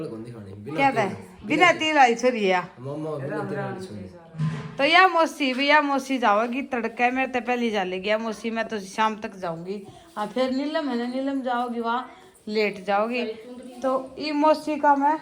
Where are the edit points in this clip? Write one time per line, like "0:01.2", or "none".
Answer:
none